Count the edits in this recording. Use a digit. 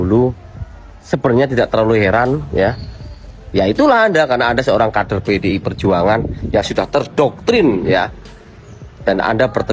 0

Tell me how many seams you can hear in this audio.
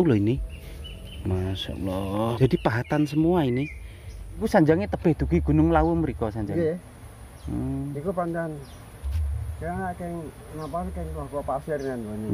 2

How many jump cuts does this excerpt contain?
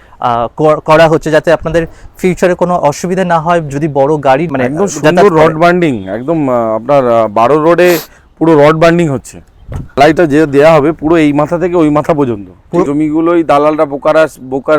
3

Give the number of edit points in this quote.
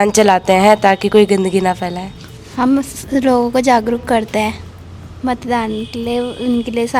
1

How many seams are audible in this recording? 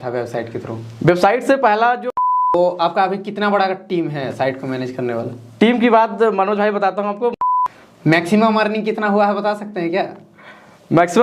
2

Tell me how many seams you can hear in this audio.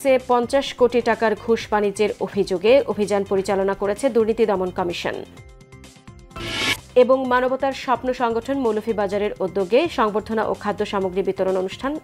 0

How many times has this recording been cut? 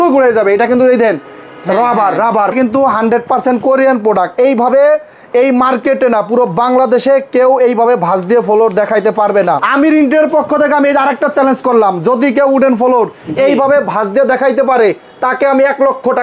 2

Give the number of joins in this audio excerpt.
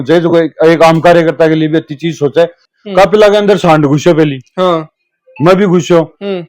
1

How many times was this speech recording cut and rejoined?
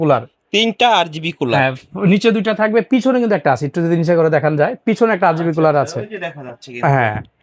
0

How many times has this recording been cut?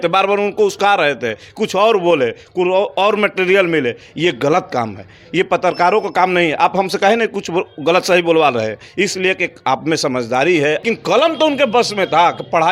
1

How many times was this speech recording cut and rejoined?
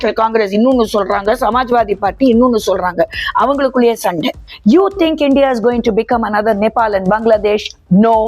1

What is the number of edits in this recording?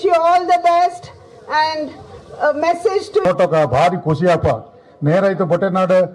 1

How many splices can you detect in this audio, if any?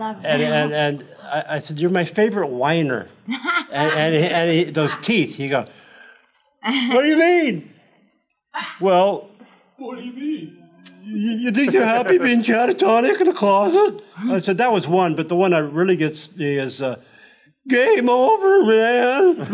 0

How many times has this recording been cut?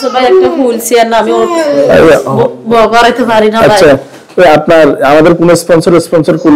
0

